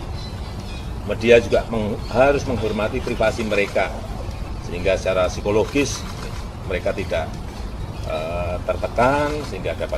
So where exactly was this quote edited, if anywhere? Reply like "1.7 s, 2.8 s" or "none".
none